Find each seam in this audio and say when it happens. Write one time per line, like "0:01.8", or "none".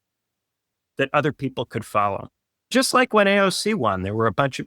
0:02.7